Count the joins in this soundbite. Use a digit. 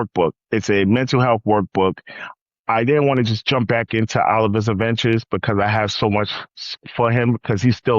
1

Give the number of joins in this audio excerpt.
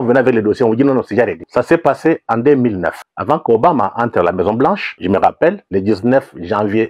4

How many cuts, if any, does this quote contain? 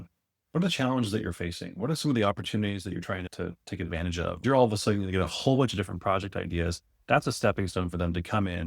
1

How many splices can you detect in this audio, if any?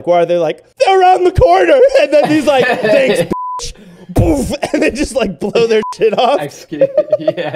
0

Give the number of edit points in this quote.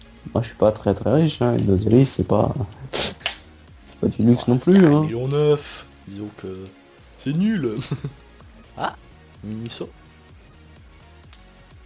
1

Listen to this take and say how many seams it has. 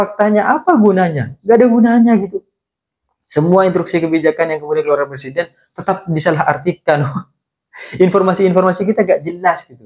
0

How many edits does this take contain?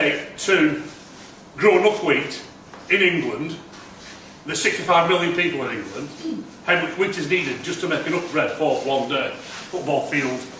1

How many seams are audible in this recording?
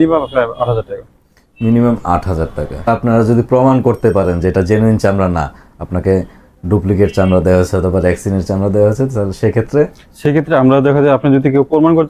1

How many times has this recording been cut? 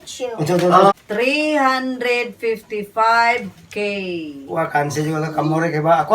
1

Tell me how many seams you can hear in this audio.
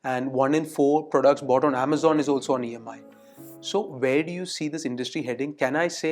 0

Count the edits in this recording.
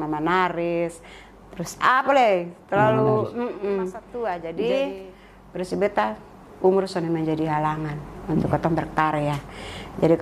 1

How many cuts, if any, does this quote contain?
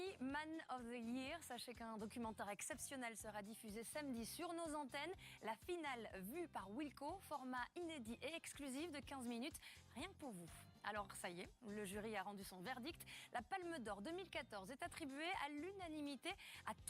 1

